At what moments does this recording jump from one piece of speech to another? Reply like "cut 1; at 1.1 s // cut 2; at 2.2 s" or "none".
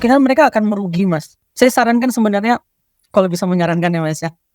cut 1; at 1.3 s